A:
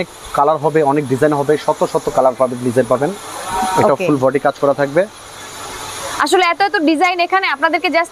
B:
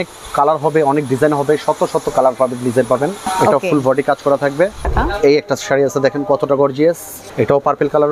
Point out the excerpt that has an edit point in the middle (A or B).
B